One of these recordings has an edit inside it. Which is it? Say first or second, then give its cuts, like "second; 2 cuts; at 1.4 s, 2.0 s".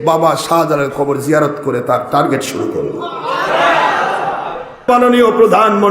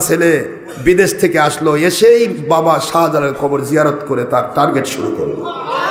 first; 1 cut; at 4.9 s